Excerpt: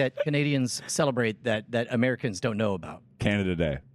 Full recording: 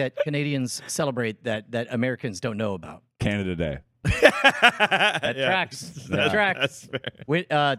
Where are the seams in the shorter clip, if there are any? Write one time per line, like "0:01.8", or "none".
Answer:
none